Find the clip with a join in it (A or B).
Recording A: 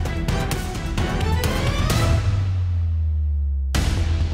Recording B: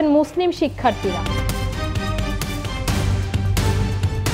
B